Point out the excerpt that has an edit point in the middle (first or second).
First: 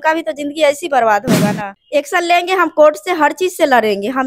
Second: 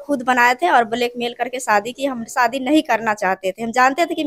first